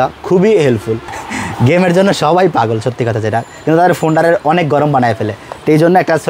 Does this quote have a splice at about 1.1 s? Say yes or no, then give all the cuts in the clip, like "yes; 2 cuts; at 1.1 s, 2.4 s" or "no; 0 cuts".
yes; 1 cut; at 1.1 s